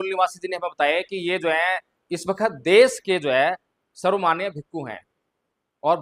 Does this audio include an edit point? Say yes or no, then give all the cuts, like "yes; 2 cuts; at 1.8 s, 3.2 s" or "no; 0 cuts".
no; 0 cuts